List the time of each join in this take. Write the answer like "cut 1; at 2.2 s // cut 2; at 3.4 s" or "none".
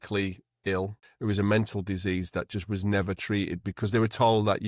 cut 1; at 1.0 s